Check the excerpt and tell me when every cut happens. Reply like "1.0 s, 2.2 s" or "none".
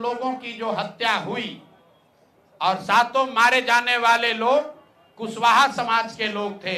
none